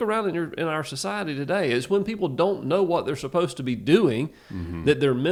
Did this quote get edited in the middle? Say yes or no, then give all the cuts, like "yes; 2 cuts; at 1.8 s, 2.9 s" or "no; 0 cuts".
no; 0 cuts